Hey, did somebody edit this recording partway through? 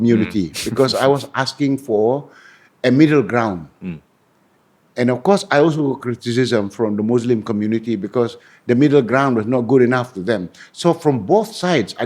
no; 0 cuts

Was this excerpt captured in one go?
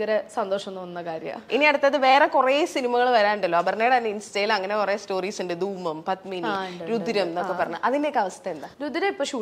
yes; 0 cuts

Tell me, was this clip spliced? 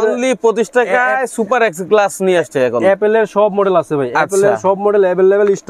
no; 0 cuts

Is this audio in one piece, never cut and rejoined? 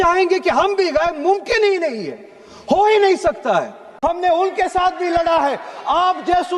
no; 1 cut; at 3.9 s

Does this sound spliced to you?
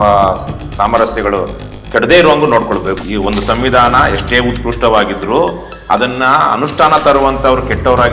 yes; 1 cut; at 2.9 s

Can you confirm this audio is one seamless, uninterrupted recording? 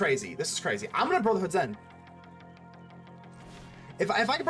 yes; 0 cuts

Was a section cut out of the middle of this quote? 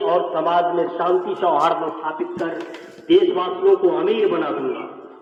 no; 0 cuts

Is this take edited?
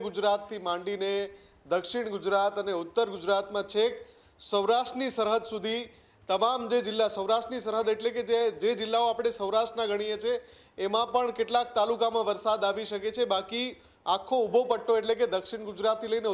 no; 0 cuts

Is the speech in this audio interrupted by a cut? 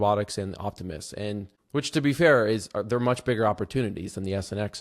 yes; 1 cut; at 1.6 s

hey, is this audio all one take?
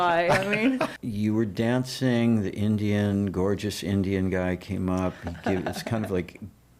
no; 1 cut; at 1.0 s

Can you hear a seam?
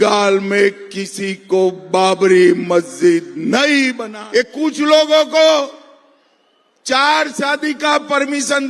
yes; 1 cut; at 4.1 s

